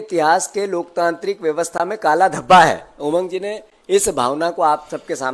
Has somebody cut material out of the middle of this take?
no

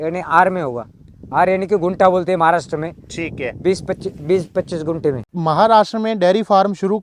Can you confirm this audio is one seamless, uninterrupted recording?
no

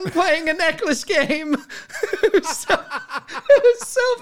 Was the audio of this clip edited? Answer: no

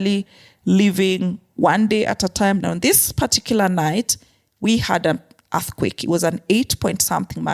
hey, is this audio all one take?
no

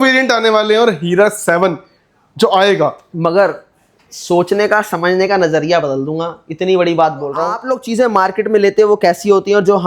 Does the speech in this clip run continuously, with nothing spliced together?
no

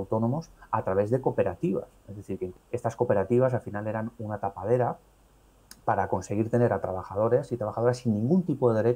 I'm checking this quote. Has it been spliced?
yes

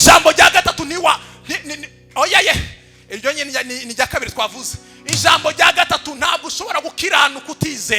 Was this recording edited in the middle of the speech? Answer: no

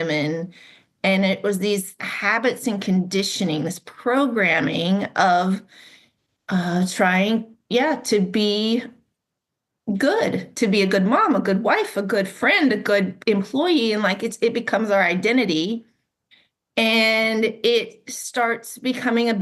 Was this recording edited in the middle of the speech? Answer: yes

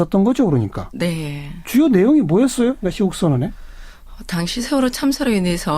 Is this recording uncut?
no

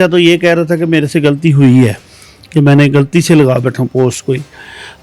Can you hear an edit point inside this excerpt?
no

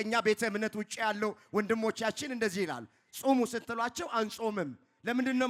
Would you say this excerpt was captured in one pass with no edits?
yes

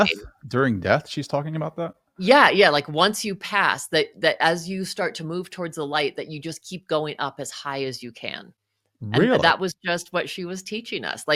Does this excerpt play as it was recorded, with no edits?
yes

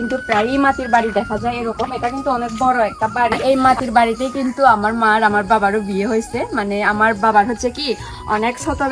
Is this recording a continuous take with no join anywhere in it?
no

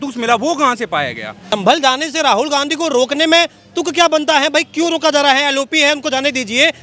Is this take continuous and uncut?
no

